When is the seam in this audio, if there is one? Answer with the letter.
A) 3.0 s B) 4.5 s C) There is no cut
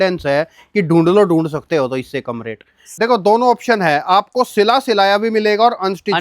A